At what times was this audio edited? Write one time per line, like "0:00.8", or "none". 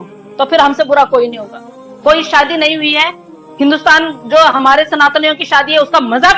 none